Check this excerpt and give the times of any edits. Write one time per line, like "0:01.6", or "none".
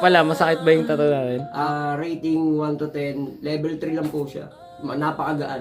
0:01.5